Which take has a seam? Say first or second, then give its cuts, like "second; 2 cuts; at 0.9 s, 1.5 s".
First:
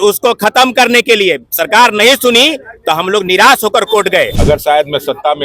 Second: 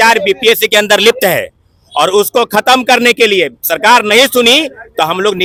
first; 1 cut; at 4.3 s